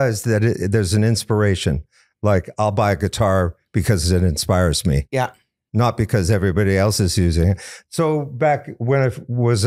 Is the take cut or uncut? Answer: uncut